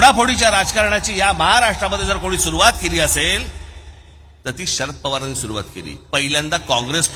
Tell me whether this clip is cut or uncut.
uncut